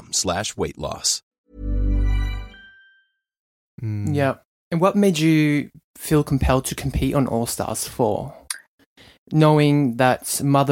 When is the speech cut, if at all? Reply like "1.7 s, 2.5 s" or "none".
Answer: 1.4 s, 3.6 s

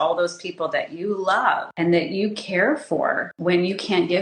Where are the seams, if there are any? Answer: 1.7 s, 3.3 s

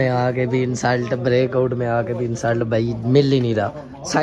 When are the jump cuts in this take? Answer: none

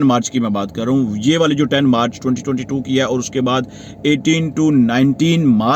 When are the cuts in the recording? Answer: none

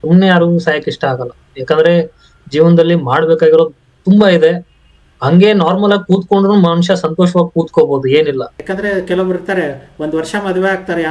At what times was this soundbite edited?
8.6 s

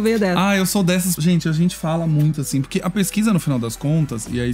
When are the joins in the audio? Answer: 1.2 s

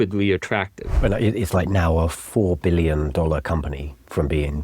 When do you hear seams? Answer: 0.9 s

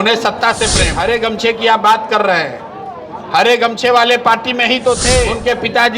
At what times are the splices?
0.9 s, 4.9 s

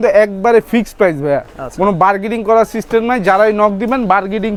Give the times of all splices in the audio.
none

